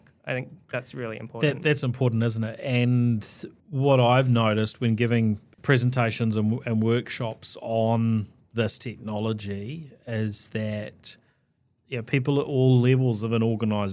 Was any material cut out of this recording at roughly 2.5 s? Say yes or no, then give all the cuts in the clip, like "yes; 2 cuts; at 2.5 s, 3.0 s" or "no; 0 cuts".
no; 0 cuts